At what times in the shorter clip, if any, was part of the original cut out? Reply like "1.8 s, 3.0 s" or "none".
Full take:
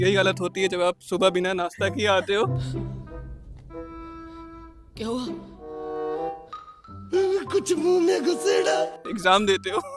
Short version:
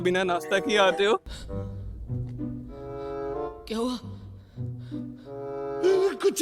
none

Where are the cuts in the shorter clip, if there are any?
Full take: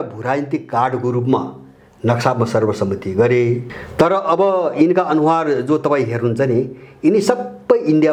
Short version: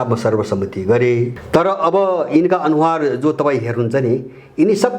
1.4 s

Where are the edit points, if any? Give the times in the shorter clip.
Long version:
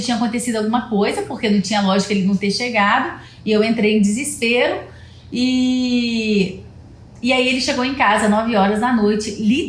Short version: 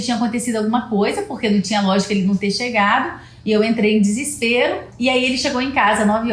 4.9 s

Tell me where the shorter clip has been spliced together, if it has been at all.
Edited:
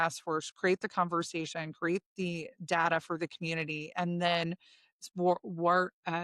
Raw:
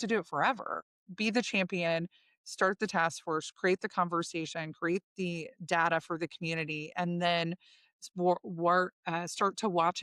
none

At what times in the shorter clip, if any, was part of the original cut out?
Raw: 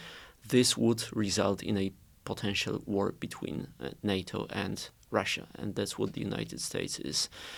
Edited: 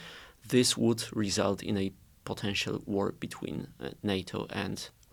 none

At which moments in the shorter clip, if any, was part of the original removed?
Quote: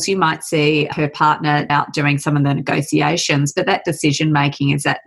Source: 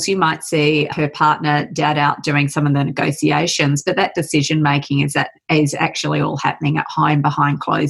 1.7 s

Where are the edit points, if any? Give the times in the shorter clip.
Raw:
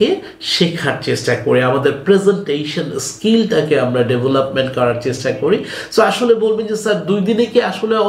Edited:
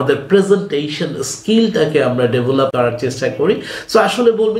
2.7 s

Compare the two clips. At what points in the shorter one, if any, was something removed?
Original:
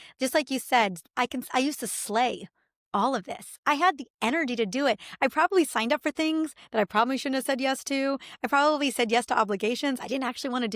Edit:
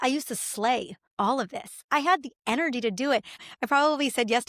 1.0 s, 3.4 s

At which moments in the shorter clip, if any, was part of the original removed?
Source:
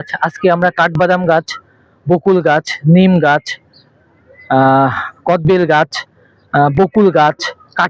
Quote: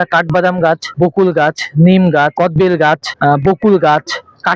0.9 s, 2.3 s, 3.1 s

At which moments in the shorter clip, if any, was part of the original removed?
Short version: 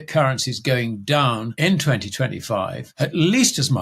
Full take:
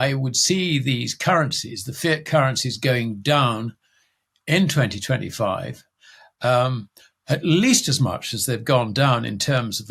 1.5 s, 2.8 s

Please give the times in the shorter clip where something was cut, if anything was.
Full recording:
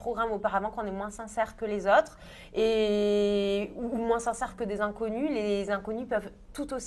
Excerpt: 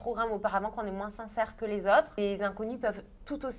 2.2 s

